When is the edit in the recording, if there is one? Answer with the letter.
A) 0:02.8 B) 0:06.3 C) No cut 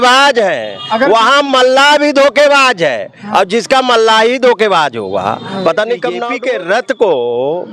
B